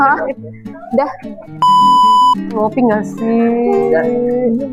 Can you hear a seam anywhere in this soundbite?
yes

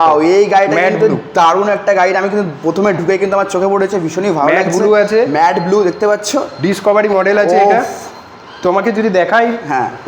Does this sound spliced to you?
no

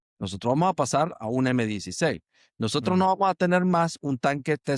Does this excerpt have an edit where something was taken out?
no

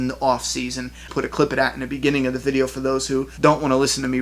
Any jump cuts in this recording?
yes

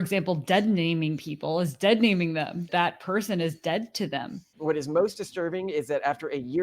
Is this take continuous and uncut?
no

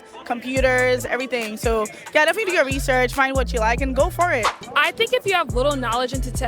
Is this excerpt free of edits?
no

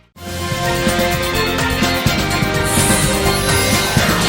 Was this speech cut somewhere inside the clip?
yes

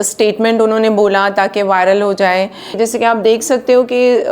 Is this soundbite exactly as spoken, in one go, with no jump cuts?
no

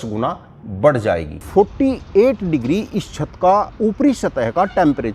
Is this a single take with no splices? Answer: no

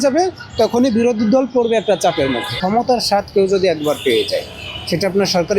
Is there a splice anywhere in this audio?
yes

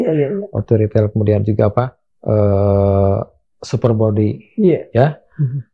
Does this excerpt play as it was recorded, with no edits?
yes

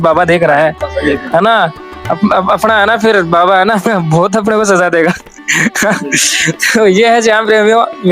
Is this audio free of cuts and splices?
yes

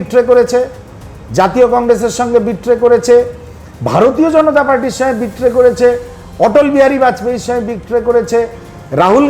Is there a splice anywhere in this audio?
no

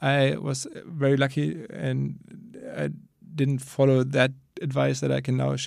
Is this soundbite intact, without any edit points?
yes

